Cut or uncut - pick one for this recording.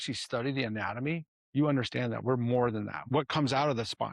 cut